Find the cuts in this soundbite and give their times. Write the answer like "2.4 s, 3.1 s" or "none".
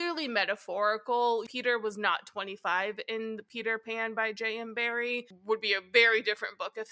1.5 s